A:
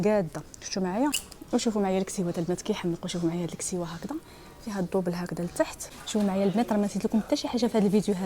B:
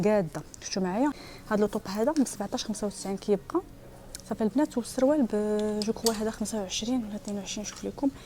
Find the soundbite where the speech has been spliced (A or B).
A